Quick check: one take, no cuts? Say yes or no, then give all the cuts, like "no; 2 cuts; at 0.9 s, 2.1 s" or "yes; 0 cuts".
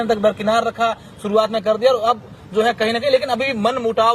yes; 0 cuts